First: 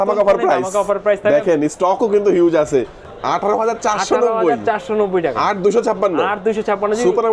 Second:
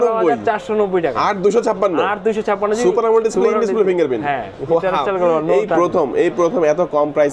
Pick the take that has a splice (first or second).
first